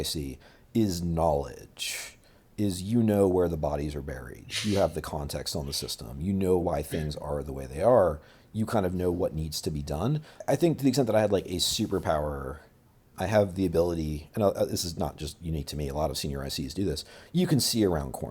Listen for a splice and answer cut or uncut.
cut